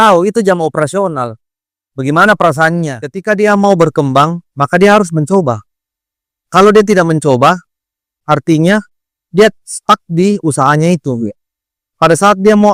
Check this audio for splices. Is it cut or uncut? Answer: cut